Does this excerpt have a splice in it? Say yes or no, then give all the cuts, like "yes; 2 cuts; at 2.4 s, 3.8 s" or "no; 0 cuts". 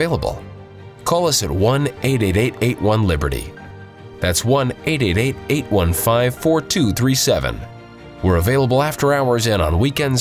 no; 0 cuts